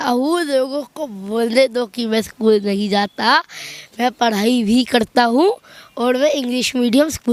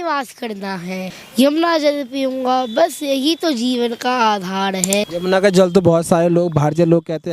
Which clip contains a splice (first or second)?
second